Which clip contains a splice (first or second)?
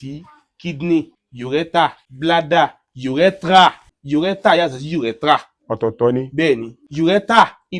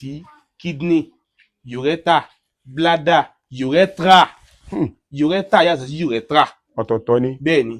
first